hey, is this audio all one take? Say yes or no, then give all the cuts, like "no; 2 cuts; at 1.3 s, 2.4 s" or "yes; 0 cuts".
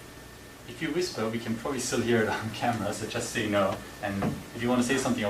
no; 1 cut; at 1.4 s